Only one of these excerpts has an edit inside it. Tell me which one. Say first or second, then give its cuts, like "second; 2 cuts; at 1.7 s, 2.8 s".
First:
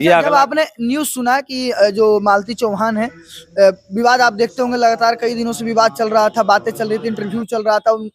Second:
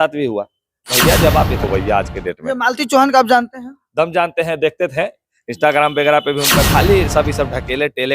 second; 2 cuts; at 1.7 s, 6.7 s